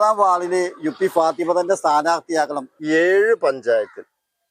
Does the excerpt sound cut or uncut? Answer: cut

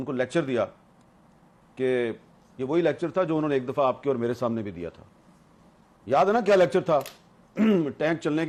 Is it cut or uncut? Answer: uncut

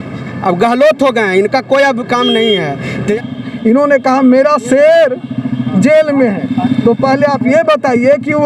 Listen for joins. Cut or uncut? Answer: cut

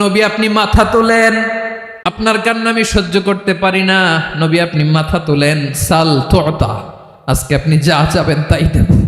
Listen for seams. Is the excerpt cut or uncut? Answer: cut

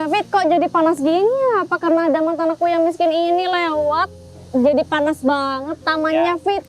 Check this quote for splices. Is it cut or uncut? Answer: uncut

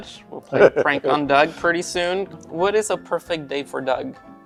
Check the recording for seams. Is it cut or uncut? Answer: uncut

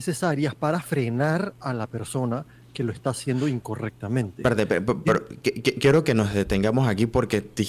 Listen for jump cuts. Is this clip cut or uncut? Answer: uncut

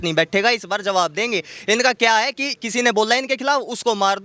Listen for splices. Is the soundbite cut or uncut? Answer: uncut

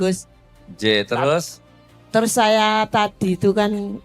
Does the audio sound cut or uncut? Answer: uncut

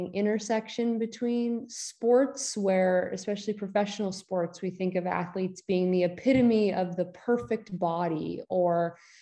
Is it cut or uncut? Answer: uncut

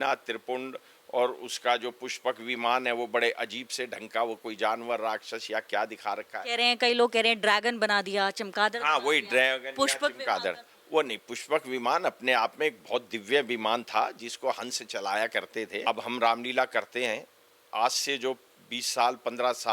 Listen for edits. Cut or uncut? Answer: cut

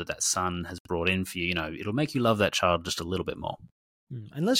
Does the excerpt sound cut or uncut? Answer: uncut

